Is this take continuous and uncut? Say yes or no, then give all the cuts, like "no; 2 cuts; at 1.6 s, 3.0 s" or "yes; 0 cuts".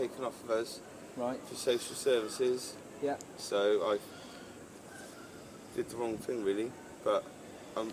yes; 0 cuts